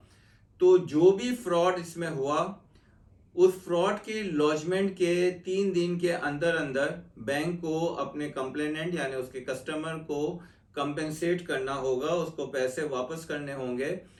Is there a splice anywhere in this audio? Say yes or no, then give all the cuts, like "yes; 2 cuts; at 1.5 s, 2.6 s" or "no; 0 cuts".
no; 0 cuts